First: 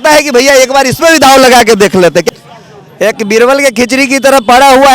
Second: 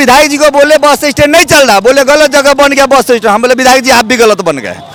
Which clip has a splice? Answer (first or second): first